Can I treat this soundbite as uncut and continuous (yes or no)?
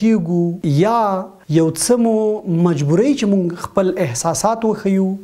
no